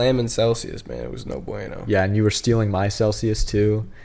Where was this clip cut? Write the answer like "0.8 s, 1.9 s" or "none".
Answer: none

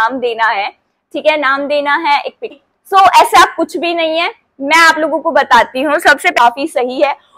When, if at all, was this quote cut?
2.5 s, 6.4 s

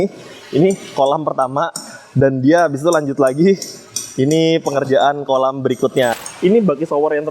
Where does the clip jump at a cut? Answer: 6.2 s

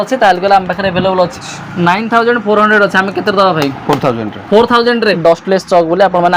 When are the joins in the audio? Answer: 1.4 s, 5.2 s

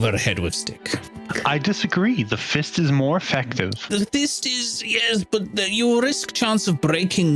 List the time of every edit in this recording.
1.2 s, 3.8 s

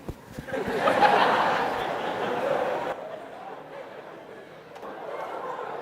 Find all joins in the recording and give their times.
4.9 s

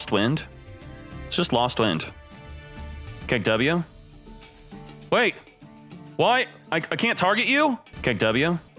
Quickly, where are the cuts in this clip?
7.9 s

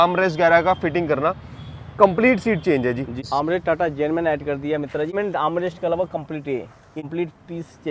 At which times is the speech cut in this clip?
3.2 s, 5.1 s, 7.0 s

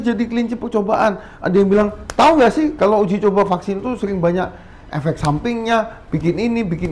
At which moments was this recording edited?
none

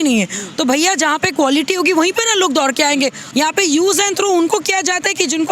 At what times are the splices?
3.2 s

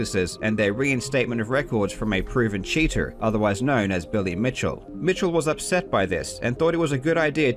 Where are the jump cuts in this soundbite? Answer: none

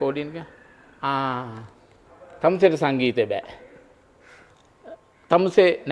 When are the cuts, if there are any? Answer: none

